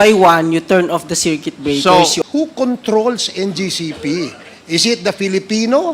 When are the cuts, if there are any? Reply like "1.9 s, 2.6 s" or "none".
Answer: 2.2 s